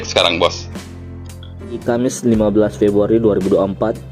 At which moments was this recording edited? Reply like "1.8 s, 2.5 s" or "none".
1.8 s